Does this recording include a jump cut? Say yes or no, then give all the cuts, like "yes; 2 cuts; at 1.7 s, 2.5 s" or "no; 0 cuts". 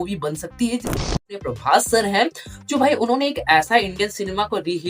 yes; 1 cut; at 1.2 s